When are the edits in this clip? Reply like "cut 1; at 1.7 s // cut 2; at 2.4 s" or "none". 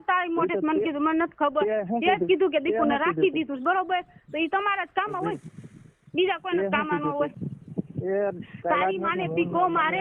cut 1; at 7.5 s